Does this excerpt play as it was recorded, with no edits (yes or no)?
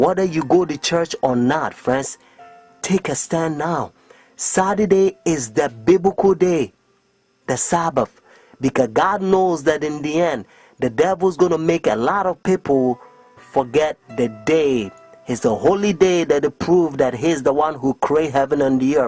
no